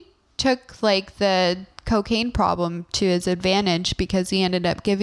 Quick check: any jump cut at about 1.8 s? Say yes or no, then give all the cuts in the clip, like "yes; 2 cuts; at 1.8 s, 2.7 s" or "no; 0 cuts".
no; 0 cuts